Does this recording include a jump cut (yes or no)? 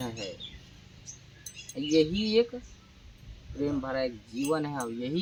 no